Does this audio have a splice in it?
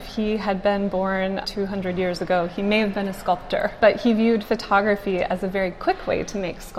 yes; 2 cuts; at 1.4 s, 3.8 s

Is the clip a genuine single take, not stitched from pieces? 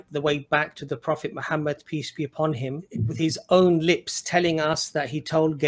no; 1 cut; at 3.0 s

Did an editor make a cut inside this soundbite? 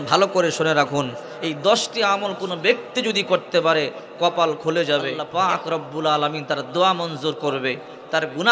yes; 1 cut; at 5.2 s

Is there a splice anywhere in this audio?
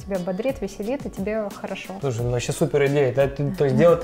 no; 0 cuts

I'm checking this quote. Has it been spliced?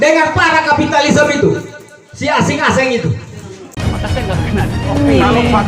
yes; 1 cut; at 3.6 s

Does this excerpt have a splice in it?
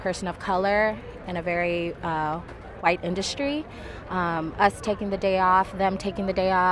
no; 0 cuts

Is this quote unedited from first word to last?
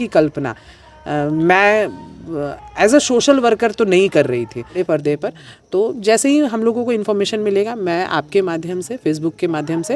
no; 1 cut; at 4.8 s

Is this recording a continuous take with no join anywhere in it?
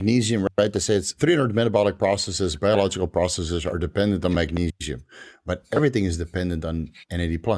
no; 1 cut; at 1.1 s

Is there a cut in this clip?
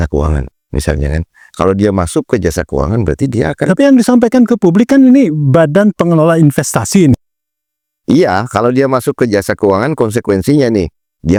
no; 0 cuts

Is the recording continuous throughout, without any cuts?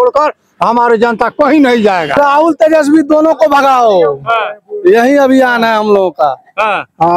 no; 1 cut; at 2.2 s

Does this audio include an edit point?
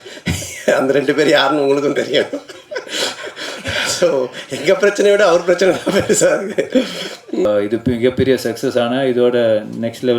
yes; 1 cut; at 7.5 s

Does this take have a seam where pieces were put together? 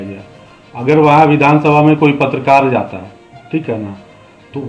no; 0 cuts

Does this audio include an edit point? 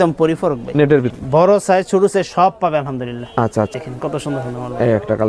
yes; 2 cuts; at 1.1 s, 3.7 s

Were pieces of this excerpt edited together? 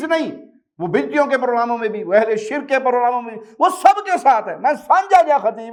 no; 0 cuts

